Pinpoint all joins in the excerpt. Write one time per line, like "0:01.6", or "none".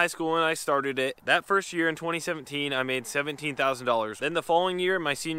none